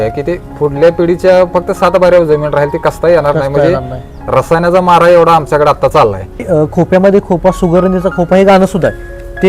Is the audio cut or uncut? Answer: cut